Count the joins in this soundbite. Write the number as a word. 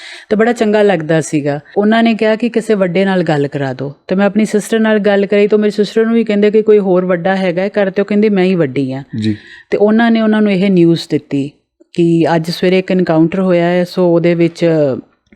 one